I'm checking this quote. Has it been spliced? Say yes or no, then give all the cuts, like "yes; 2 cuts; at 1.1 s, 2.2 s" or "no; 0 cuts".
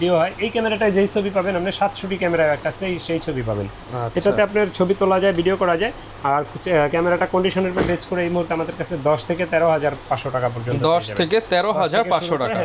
no; 0 cuts